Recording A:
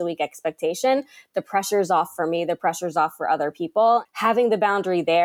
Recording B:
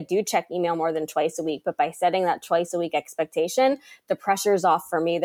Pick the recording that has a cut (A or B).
A